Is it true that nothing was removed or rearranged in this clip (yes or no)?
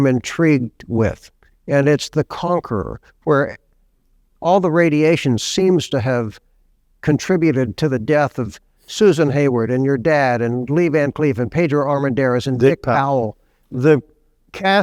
no